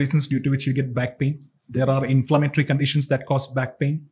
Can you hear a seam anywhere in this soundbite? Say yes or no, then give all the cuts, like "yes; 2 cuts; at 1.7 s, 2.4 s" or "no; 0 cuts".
no; 0 cuts